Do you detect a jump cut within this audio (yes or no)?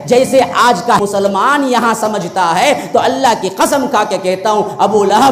yes